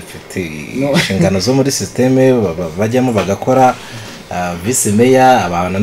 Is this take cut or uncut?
uncut